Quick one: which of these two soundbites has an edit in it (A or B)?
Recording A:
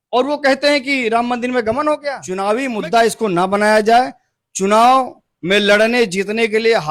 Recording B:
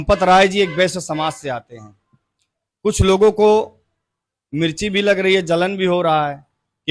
A